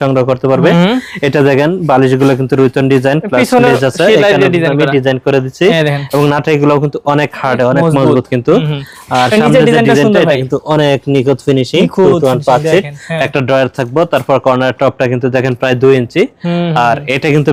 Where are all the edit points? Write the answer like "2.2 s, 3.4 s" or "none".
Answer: none

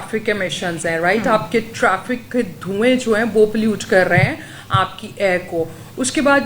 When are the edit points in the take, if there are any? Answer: none

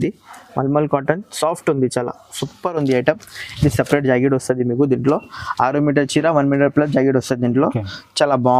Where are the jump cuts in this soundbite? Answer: none

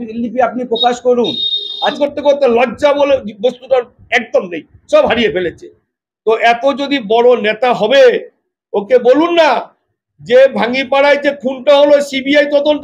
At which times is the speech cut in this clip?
2.0 s

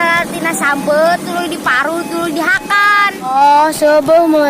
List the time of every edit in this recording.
3.3 s

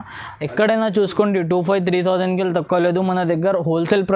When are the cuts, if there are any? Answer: none

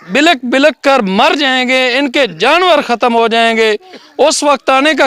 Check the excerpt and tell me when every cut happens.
none

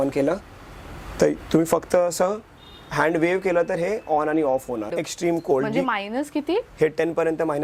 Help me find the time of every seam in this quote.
4.9 s

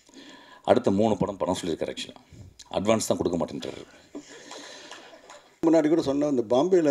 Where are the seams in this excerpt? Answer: 5.6 s

